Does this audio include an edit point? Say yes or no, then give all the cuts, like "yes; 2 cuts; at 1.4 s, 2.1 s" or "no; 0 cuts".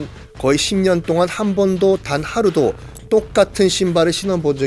no; 0 cuts